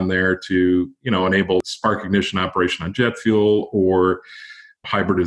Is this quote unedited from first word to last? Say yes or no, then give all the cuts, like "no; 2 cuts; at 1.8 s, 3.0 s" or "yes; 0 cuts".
yes; 0 cuts